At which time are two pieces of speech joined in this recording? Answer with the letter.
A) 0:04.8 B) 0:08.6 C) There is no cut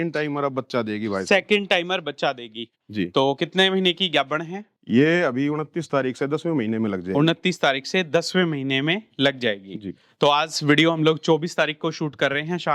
C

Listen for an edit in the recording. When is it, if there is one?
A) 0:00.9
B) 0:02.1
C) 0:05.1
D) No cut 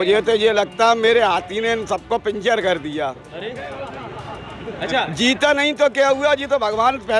D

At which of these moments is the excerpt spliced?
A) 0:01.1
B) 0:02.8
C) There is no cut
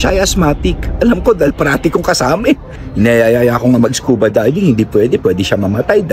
B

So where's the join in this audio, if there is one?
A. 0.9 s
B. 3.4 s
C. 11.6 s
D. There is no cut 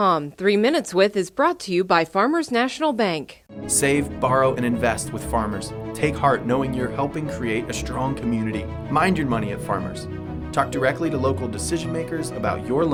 D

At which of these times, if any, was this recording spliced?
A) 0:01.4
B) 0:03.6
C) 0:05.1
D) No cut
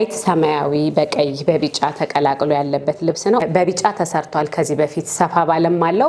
B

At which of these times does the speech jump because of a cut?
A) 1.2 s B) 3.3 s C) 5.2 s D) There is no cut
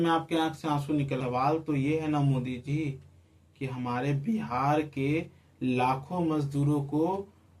A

